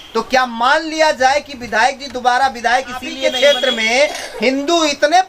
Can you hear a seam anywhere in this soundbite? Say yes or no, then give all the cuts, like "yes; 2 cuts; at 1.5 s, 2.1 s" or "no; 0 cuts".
yes; 1 cut; at 3.2 s